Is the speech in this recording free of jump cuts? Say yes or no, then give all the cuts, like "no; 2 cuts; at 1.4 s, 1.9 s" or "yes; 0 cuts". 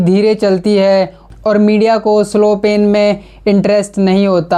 yes; 0 cuts